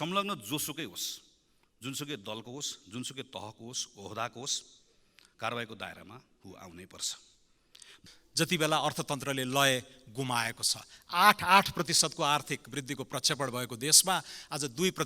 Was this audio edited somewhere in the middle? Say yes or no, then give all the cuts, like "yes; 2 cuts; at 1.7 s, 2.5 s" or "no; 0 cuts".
yes; 1 cut; at 7.9 s